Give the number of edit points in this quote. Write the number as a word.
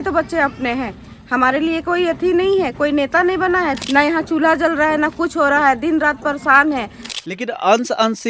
two